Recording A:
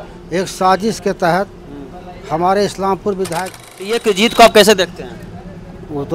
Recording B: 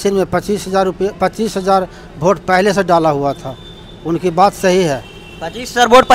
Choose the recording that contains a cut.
A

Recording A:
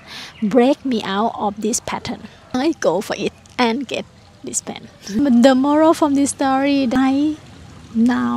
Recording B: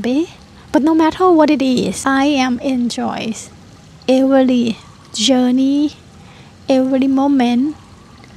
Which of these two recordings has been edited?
A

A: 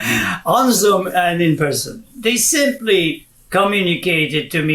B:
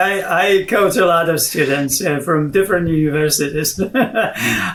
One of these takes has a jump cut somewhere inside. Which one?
A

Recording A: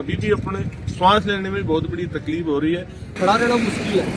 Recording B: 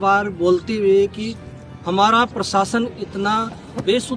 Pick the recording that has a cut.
A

